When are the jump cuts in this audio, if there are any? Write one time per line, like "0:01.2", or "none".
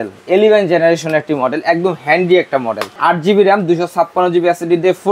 0:02.8

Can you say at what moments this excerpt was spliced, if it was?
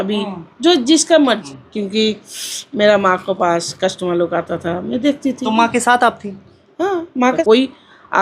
0:01.6
0:07.4

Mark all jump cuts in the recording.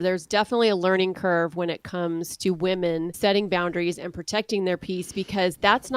0:03.1

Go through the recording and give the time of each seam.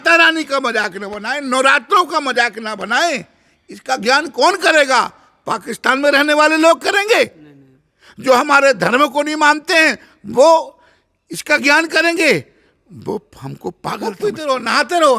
0:14.1

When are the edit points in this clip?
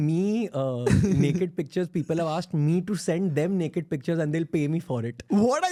none

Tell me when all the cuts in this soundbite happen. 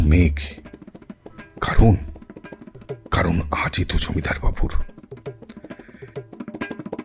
none

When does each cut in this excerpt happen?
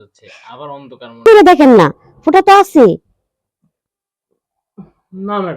0:01.2

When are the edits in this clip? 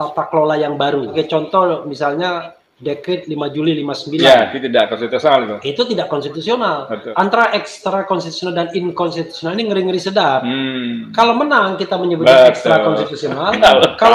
0:01.1
0:07.0

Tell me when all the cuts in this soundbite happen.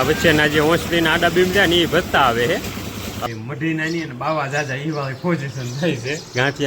0:03.2

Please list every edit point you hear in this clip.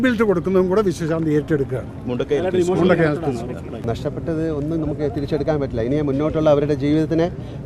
0:03.9

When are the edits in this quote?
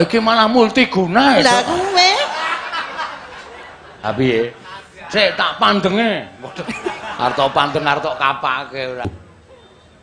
0:09.0

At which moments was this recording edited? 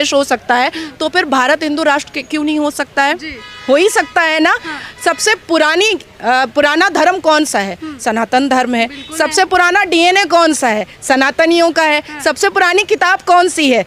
none

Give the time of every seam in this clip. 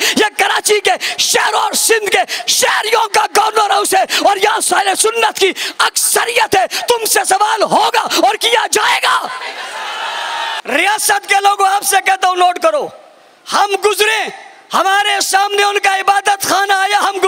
0:10.6

